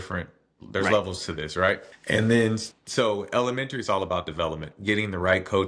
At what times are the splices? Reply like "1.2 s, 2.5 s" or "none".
1.9 s, 2.7 s